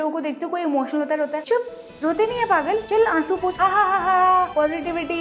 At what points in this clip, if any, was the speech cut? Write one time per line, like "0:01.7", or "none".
none